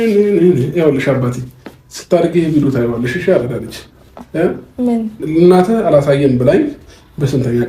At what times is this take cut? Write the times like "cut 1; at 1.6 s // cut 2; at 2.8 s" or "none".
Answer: cut 1; at 5.2 s